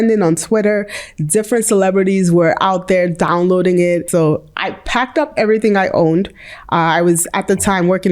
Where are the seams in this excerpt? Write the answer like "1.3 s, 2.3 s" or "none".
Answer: 4.1 s